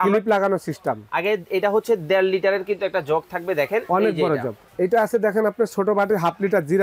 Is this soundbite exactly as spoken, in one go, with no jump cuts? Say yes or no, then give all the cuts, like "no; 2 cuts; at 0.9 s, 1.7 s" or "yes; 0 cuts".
no; 1 cut; at 4.6 s